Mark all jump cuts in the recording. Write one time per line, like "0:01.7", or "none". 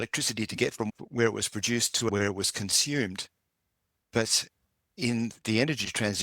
0:00.9
0:02.1